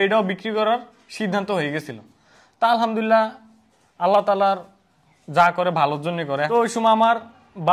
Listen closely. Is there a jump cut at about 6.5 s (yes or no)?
yes